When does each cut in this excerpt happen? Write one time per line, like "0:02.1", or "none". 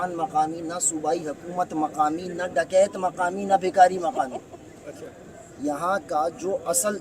none